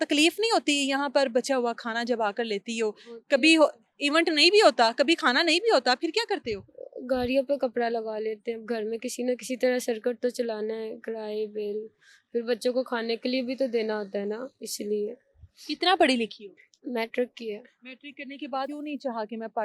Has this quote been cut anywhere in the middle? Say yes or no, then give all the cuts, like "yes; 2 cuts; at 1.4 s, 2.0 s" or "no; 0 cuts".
no; 0 cuts